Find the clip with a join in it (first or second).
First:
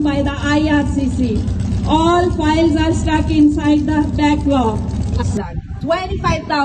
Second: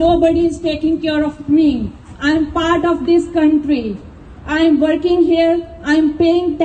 first